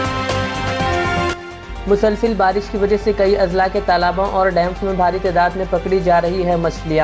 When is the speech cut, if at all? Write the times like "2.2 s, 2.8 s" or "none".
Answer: 1.5 s